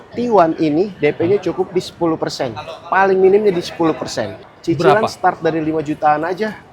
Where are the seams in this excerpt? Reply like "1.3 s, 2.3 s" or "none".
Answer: 4.4 s